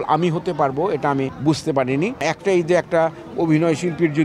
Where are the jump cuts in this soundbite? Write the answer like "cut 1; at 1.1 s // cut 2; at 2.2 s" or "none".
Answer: cut 1; at 1.3 s // cut 2; at 2.2 s